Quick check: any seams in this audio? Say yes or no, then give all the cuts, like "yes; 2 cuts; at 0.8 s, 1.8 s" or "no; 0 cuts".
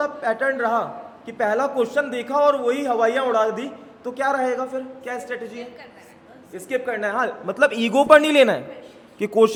no; 0 cuts